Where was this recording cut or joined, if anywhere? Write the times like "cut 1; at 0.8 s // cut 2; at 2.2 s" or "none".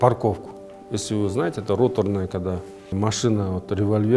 cut 1; at 2.9 s